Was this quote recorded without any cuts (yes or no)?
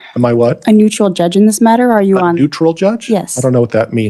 yes